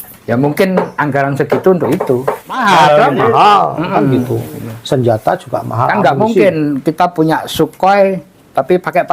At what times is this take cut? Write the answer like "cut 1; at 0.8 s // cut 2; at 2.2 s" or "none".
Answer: cut 1; at 2.6 s